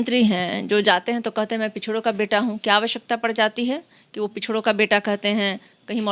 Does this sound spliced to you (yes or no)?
no